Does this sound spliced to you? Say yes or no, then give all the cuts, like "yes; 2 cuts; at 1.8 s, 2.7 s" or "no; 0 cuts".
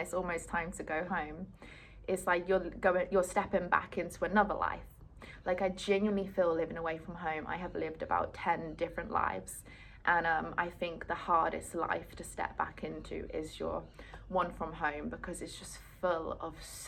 no; 0 cuts